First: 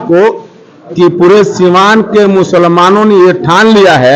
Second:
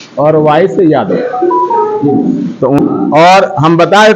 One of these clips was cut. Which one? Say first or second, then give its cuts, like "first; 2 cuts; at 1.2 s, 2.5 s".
second; 1 cut; at 2.8 s